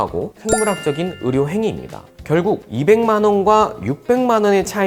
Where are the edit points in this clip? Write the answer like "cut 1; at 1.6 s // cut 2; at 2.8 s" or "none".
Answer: cut 1; at 2.1 s